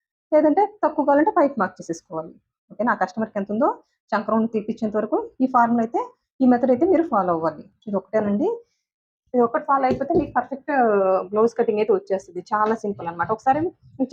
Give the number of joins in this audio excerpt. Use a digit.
0